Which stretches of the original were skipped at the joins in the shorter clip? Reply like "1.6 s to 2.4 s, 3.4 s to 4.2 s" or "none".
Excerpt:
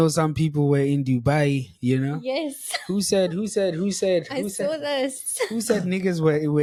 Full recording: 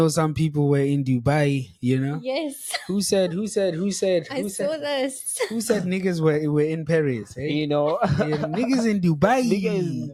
none